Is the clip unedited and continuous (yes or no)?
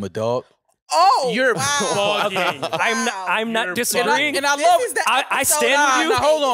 yes